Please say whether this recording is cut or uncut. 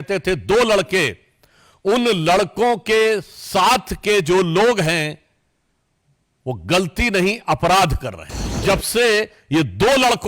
cut